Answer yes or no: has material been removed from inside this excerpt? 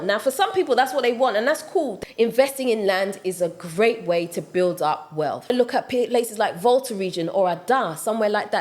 yes